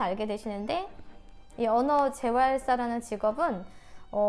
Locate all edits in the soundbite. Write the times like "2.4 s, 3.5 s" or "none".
1.0 s